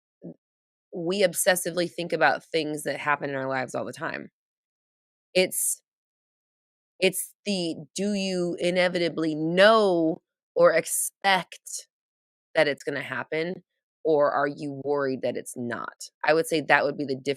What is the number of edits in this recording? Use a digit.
1